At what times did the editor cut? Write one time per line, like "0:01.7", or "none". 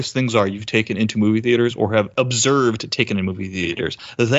0:02.1